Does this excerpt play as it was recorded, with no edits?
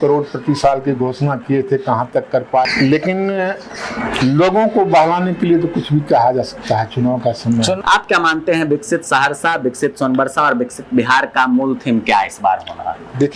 no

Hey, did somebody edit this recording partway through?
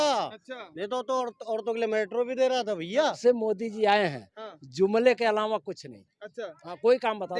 yes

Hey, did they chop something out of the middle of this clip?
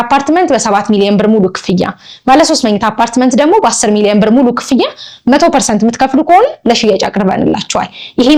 no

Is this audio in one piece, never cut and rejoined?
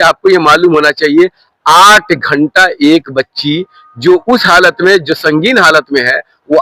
yes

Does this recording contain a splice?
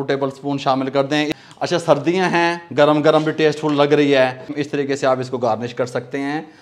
yes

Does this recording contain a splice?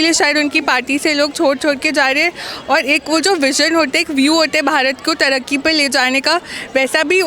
no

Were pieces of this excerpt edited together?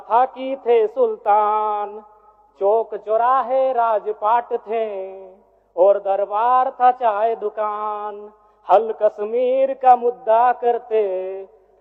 no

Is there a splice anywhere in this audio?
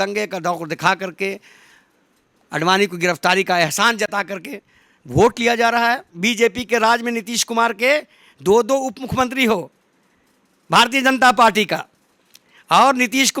yes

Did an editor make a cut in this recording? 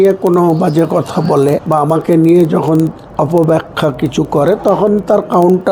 yes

